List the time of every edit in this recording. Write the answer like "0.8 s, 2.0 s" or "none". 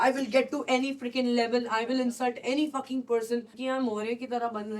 3.5 s